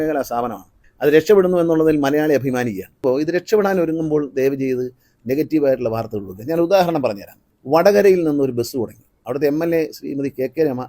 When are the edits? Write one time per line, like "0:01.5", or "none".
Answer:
0:03.0